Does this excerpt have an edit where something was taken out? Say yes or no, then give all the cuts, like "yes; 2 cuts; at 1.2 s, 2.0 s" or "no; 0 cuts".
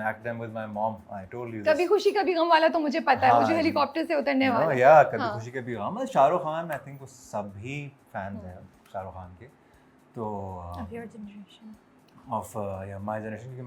no; 0 cuts